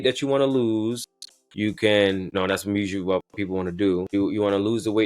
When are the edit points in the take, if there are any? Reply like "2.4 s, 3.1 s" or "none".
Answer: 2.3 s, 4.1 s